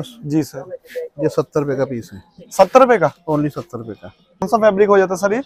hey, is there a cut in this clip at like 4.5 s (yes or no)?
yes